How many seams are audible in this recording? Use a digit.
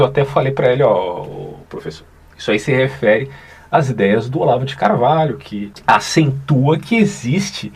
1